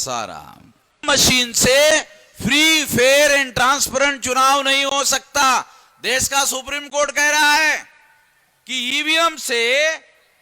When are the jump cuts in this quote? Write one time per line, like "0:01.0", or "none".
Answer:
0:01.0